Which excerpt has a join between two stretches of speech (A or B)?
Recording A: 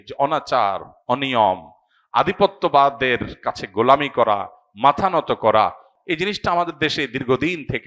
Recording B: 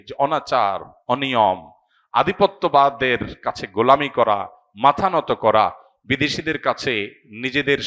A